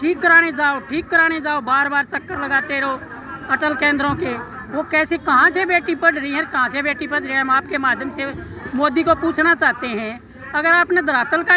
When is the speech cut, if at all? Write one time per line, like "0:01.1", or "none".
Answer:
none